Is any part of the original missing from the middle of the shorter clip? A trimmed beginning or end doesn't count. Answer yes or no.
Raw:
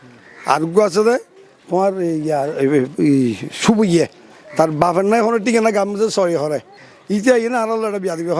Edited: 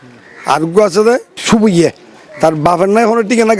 yes